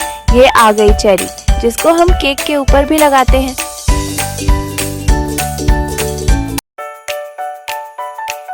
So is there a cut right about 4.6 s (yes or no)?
no